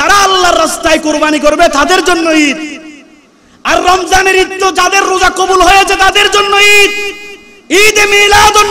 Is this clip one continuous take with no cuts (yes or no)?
yes